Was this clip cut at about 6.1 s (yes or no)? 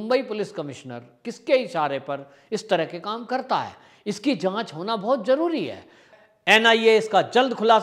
yes